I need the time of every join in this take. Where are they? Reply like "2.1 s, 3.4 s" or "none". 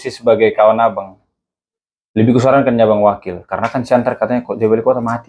none